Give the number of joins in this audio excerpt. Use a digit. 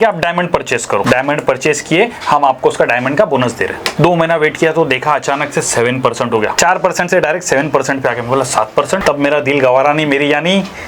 4